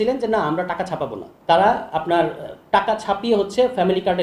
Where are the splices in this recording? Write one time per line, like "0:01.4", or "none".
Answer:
0:01.3